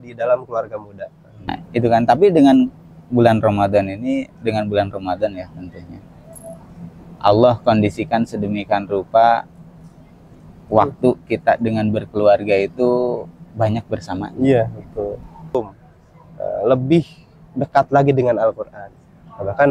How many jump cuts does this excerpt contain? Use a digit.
2